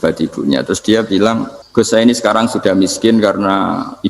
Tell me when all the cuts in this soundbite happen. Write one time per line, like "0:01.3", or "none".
0:01.6